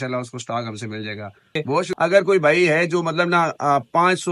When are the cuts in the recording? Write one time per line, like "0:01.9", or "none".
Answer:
0:01.8